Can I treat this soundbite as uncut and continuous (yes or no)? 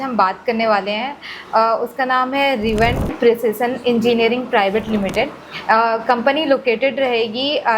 yes